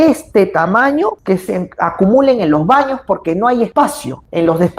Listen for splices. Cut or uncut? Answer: cut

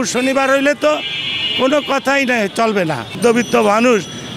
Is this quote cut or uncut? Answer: cut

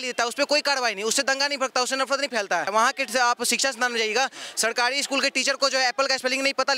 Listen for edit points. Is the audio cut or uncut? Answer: cut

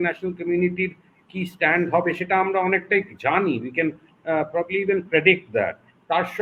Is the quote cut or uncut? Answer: uncut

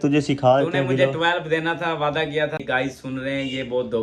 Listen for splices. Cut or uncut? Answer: cut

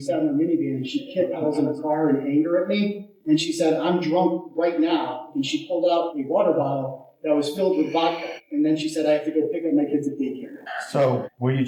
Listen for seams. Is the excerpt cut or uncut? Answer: uncut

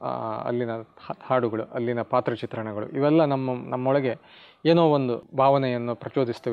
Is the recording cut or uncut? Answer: cut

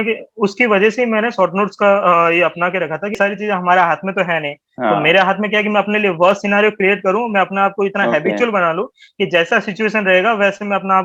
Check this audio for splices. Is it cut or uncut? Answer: cut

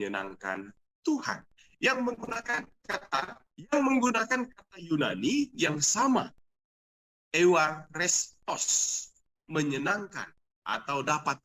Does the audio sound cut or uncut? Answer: cut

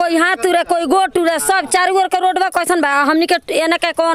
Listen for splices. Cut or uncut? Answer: uncut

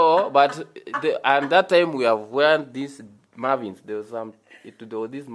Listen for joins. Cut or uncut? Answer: uncut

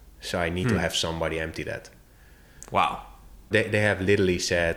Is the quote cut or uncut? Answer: cut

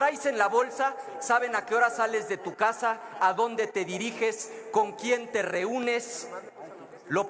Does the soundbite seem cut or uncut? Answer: uncut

